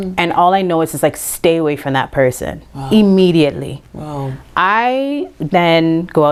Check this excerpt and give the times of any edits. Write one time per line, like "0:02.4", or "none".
none